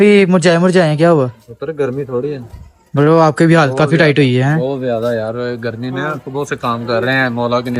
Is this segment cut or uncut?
uncut